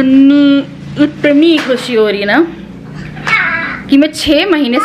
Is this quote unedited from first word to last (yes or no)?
yes